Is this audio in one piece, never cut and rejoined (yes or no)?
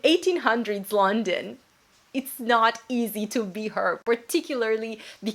yes